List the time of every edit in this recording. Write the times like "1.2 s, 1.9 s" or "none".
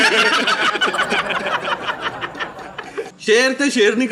3.1 s